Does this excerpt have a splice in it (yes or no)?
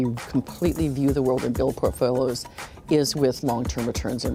no